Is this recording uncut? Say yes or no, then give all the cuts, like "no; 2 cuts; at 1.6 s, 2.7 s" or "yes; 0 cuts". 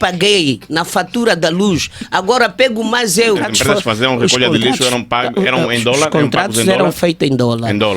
no; 1 cut; at 3.4 s